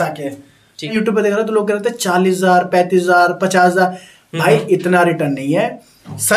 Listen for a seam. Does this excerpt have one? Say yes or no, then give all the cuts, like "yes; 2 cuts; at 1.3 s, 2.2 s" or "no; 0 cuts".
yes; 1 cut; at 0.9 s